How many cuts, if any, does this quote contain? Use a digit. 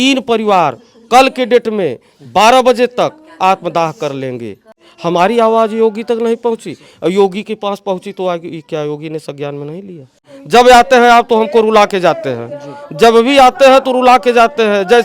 2